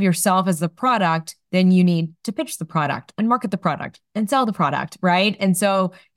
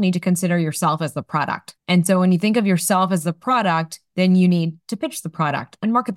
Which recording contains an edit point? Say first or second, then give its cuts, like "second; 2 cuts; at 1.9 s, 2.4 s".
second; 1 cut; at 1.7 s